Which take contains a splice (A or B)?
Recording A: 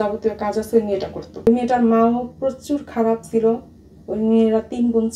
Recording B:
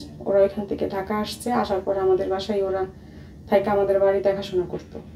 A